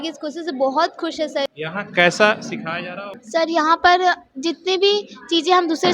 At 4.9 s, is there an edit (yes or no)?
no